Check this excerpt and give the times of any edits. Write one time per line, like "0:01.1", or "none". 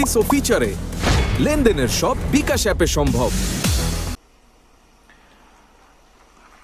none